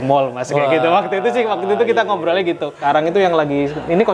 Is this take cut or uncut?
cut